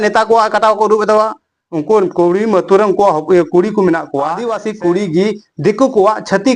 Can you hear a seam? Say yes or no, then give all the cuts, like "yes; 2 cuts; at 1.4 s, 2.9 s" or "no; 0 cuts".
yes; 1 cut; at 4.4 s